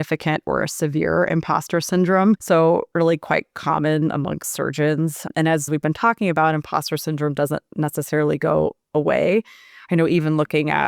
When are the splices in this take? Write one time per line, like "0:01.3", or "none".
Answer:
0:02.4
0:05.3